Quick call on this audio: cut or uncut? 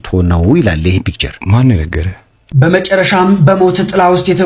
cut